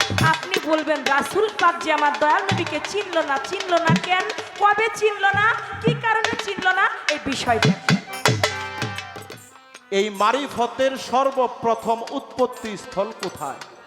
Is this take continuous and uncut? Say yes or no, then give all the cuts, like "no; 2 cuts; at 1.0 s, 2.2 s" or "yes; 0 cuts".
no; 1 cut; at 9.1 s